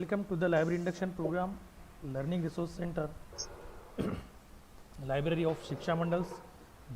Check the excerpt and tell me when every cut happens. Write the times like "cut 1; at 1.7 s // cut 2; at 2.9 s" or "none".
cut 1; at 1.8 s